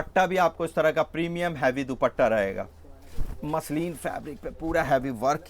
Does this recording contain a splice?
yes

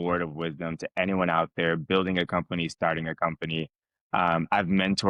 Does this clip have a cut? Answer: no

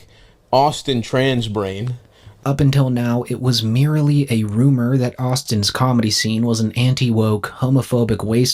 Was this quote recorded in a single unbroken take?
no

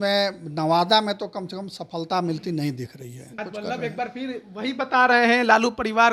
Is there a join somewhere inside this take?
yes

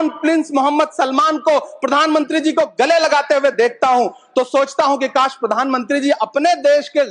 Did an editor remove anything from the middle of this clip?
no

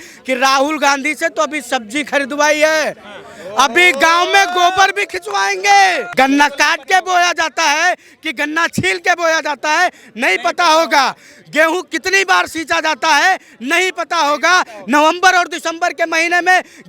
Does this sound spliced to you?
yes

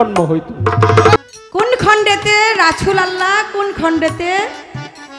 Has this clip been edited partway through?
yes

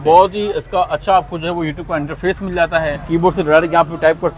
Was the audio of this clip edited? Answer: yes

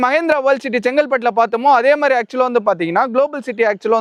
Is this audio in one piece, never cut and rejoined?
yes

